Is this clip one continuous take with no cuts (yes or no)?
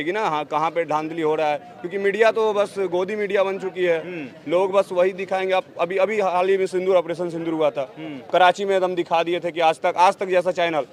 yes